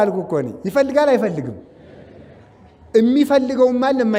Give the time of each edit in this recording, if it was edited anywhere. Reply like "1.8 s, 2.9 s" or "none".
none

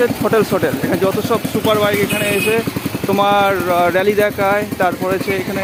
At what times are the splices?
none

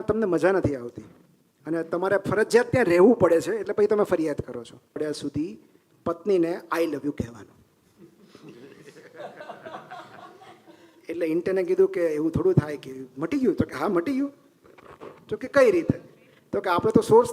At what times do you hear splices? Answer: 5.0 s

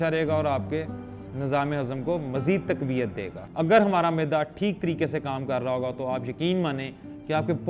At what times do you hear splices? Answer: 3.4 s

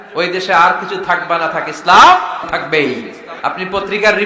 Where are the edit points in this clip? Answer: 2.5 s, 3.3 s

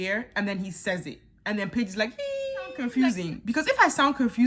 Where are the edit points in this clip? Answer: 2.8 s

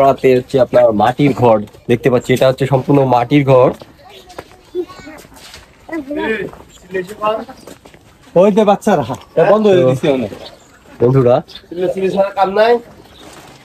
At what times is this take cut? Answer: none

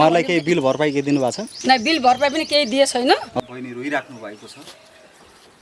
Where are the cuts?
3.3 s

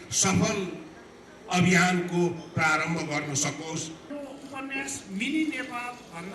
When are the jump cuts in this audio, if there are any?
4.1 s

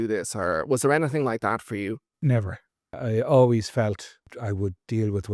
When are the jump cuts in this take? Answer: 3.0 s, 4.3 s

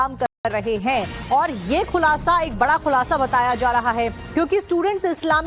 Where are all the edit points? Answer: none

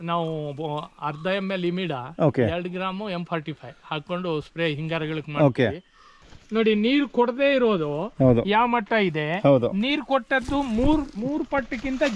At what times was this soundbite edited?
6.4 s

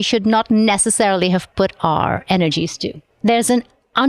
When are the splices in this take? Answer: 3.1 s

